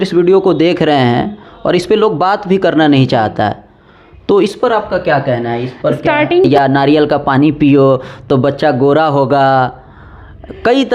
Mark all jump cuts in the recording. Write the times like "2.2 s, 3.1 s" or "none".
6.5 s